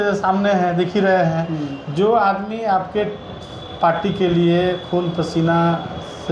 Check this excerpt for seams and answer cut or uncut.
uncut